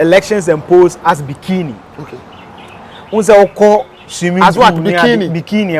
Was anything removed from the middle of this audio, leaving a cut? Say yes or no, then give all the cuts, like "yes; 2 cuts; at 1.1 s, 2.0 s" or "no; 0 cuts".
no; 0 cuts